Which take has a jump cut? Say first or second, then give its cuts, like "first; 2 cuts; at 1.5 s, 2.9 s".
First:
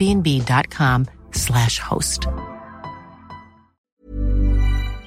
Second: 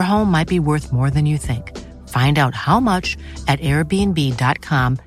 first; 1 cut; at 3.8 s